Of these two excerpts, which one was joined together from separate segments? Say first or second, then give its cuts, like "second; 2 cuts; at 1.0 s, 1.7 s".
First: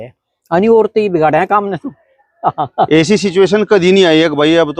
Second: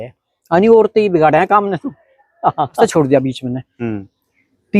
second; 1 cut; at 2.8 s